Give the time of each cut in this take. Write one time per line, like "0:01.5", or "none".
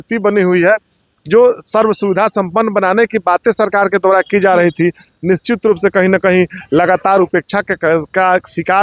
none